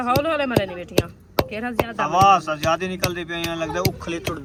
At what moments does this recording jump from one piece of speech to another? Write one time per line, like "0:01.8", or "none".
none